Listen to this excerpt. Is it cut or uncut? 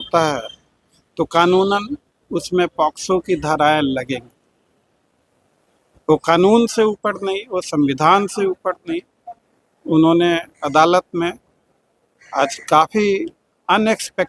uncut